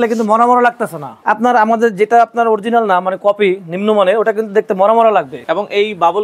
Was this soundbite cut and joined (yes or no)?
yes